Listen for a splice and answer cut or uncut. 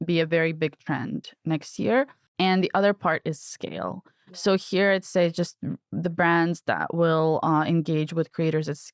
uncut